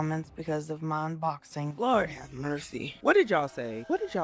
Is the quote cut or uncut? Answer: uncut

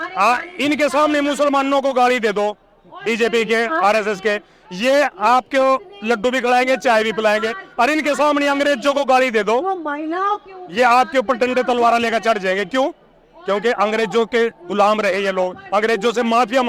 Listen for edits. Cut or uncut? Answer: uncut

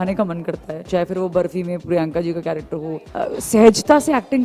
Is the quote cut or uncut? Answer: cut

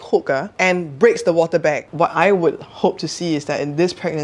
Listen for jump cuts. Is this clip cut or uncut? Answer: cut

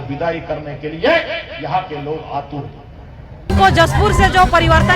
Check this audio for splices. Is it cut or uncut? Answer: cut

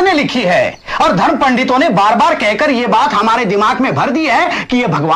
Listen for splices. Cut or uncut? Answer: uncut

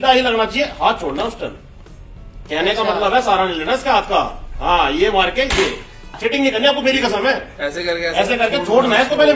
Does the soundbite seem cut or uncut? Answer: cut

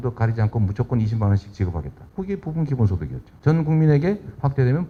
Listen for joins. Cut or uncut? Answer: uncut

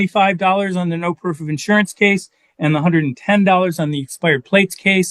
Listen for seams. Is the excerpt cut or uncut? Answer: uncut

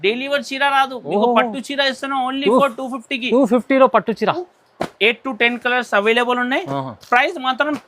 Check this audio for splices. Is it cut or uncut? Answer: cut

